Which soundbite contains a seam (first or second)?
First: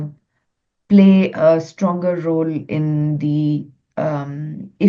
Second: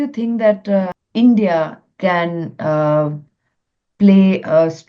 second